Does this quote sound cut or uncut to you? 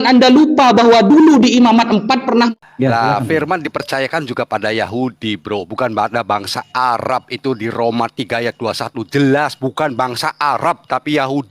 cut